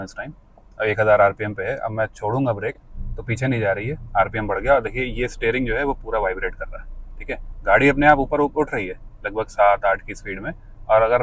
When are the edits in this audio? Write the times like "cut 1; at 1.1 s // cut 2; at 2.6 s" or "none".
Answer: none